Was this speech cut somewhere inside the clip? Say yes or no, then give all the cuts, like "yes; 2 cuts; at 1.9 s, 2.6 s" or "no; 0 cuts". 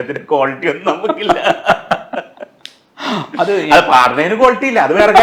no; 0 cuts